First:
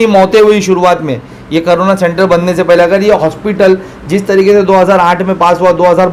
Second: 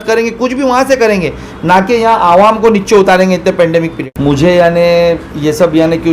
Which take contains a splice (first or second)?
second